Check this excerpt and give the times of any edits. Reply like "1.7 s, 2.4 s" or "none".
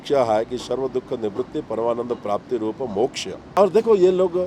3.4 s